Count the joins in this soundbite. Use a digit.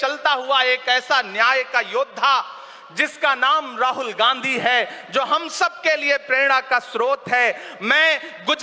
0